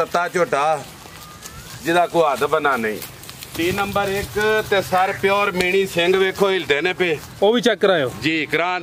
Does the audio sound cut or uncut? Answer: cut